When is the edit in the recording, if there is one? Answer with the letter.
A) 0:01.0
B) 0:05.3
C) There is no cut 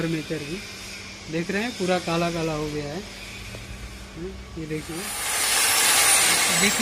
B